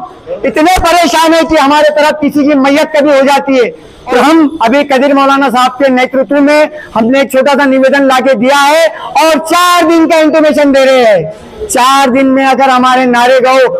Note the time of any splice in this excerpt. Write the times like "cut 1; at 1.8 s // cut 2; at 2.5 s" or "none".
cut 1; at 4.2 s